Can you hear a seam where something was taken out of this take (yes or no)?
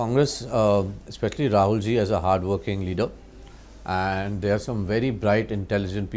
no